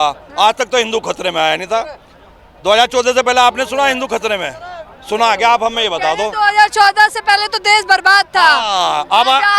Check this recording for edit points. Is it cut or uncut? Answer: uncut